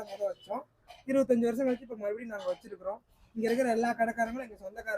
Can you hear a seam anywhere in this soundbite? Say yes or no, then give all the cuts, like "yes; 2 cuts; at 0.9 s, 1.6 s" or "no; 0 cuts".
no; 0 cuts